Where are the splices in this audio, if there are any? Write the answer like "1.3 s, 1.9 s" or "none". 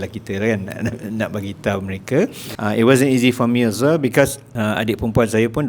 2.4 s, 4.4 s